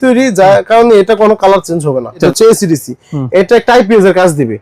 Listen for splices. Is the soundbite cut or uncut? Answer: cut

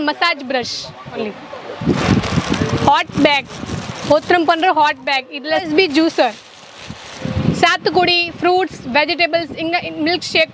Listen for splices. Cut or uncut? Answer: cut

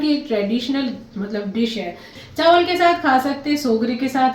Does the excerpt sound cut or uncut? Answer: cut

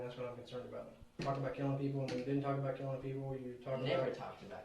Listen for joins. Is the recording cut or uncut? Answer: cut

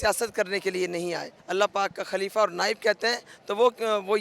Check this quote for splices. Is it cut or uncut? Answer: cut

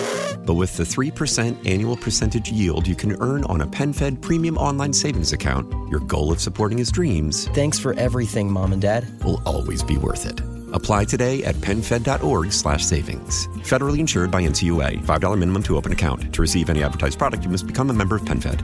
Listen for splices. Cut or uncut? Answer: uncut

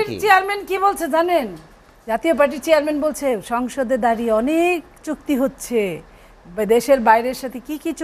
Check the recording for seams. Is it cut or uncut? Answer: uncut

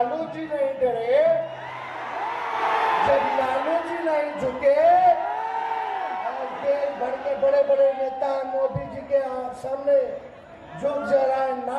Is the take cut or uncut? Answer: uncut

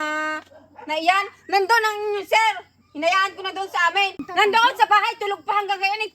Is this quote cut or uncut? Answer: cut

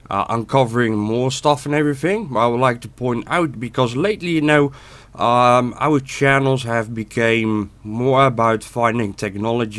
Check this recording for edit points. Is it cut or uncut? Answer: cut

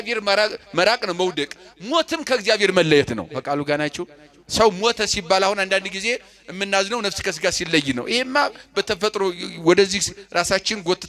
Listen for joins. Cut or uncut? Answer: uncut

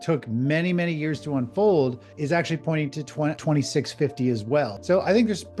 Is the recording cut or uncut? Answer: cut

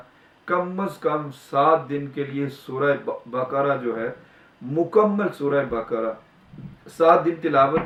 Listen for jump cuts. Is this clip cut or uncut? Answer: uncut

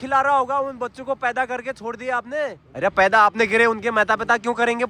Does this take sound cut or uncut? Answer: cut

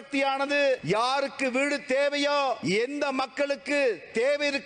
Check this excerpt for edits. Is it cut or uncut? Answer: cut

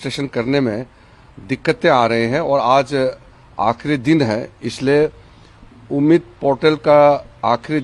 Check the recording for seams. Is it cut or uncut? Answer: uncut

